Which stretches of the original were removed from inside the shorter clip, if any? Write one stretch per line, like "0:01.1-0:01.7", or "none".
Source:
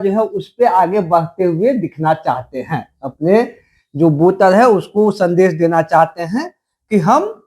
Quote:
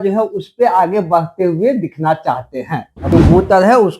0:03.1-0:04.0